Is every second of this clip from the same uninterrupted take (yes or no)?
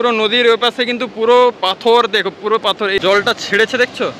no